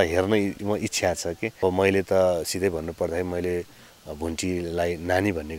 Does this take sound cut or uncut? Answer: cut